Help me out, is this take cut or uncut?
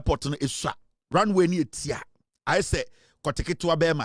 uncut